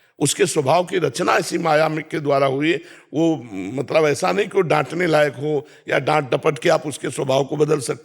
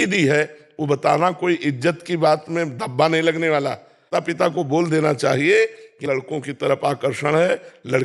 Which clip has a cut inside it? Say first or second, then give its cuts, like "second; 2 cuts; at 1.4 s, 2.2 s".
second; 1 cut; at 4.0 s